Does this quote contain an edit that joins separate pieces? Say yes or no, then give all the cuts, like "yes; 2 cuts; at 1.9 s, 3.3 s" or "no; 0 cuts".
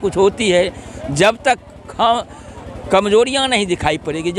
no; 0 cuts